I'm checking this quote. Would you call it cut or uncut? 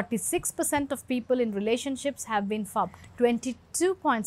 cut